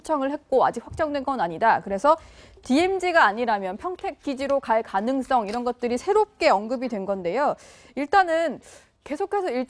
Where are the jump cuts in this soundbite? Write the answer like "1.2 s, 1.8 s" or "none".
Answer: none